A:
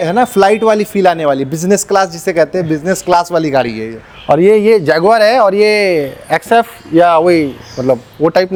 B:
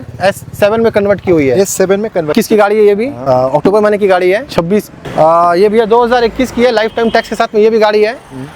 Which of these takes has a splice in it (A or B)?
B